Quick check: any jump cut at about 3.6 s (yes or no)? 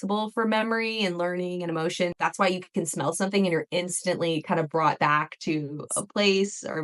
no